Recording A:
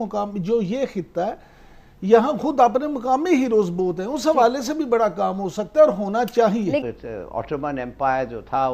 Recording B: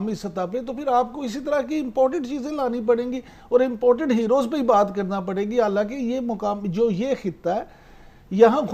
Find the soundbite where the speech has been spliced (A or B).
A